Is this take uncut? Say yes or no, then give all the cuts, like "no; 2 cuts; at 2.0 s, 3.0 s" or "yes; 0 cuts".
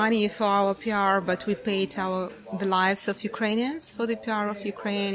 yes; 0 cuts